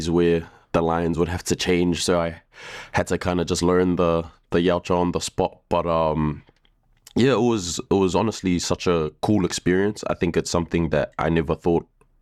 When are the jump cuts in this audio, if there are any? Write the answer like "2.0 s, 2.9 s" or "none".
none